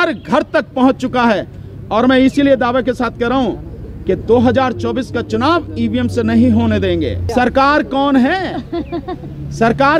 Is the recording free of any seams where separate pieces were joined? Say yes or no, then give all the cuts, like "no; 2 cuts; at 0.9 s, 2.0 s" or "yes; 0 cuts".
no; 1 cut; at 7.2 s